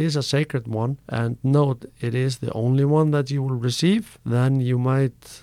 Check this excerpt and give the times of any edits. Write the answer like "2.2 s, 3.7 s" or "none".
1.0 s, 4.2 s